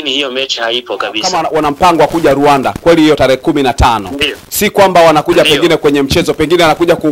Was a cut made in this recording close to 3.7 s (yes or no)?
no